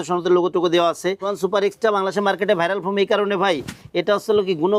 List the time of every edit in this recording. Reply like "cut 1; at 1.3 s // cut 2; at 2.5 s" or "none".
cut 1; at 1.3 s